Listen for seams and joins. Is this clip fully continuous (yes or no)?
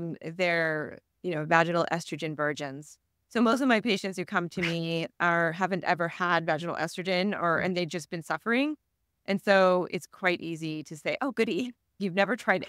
yes